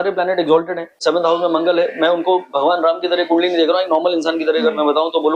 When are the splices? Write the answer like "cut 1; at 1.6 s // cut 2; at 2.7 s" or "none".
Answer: cut 1; at 1.0 s